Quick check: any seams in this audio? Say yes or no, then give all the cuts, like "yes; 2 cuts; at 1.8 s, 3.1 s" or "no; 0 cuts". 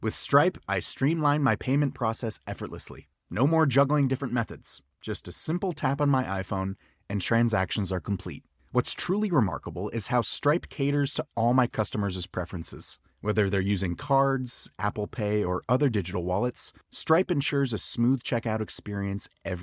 no; 0 cuts